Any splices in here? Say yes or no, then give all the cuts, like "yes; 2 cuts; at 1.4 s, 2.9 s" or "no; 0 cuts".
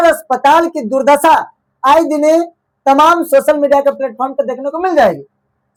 no; 0 cuts